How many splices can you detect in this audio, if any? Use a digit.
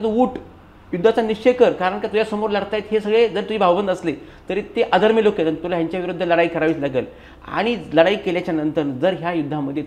0